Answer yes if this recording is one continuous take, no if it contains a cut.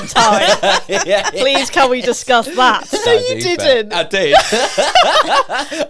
no